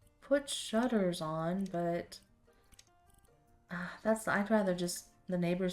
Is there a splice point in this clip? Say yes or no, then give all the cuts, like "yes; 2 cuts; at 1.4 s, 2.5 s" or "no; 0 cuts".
no; 0 cuts